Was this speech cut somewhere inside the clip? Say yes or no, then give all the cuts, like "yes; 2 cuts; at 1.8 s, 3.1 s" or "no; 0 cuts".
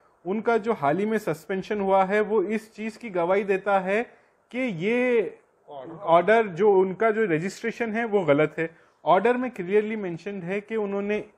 no; 0 cuts